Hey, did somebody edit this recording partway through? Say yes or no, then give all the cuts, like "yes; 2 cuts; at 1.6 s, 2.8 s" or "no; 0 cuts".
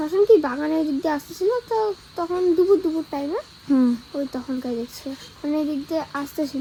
no; 0 cuts